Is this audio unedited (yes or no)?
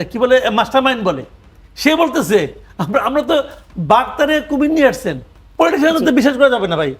no